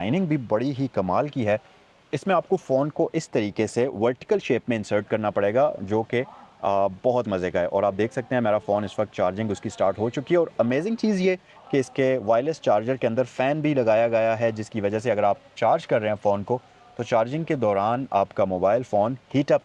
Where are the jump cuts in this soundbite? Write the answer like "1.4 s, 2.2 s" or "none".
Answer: none

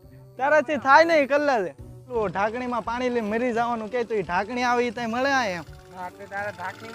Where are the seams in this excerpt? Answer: 2.2 s

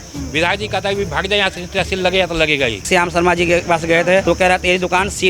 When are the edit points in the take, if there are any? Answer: 2.9 s, 4.2 s

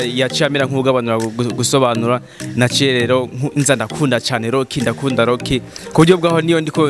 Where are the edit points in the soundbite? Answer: none

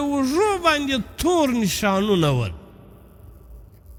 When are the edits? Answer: none

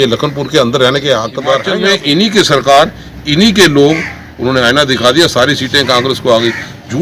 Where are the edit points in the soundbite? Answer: 1.7 s

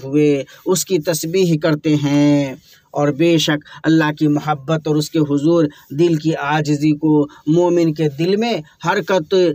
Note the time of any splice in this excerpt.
none

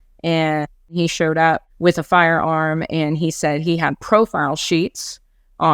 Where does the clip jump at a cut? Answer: 0.9 s

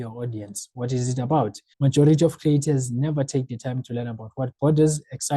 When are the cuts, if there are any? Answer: 1.6 s

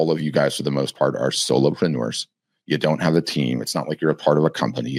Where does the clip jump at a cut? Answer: none

